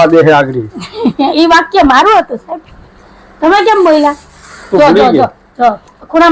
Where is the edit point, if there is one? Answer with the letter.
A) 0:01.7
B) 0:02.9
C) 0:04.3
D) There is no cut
D